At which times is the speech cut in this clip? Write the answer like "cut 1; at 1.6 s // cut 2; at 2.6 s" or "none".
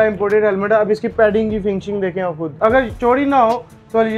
cut 1; at 2.5 s